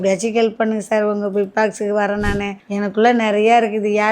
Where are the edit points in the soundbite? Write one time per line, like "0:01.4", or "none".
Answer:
0:02.6